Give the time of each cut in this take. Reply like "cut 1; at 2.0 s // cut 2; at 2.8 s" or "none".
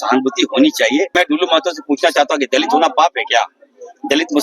cut 1; at 1.2 s